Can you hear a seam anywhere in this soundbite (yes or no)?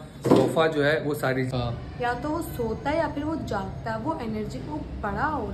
yes